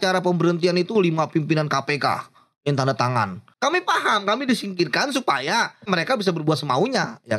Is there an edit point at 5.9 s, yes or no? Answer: yes